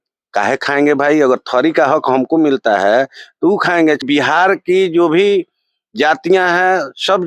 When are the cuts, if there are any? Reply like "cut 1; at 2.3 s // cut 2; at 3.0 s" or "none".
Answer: cut 1; at 4.0 s